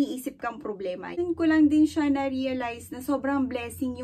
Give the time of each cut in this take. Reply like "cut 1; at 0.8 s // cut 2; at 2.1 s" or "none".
cut 1; at 1.2 s